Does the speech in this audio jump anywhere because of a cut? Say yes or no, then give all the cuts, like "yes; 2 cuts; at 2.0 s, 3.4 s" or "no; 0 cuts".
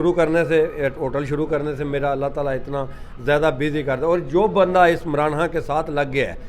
no; 0 cuts